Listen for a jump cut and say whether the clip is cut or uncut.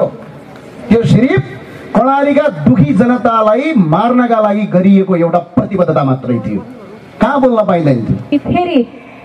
cut